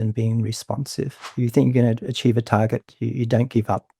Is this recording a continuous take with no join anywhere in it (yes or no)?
no